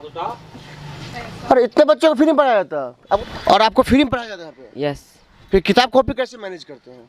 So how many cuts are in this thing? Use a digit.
1